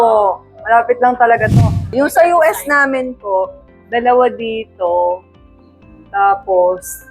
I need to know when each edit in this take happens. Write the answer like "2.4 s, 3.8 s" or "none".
1.8 s